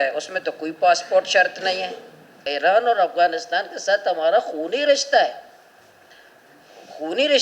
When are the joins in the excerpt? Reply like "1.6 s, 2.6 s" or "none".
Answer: 2.4 s